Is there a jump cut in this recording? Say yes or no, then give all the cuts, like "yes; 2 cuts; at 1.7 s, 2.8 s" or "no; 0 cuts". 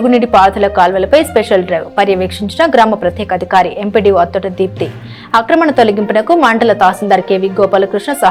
no; 0 cuts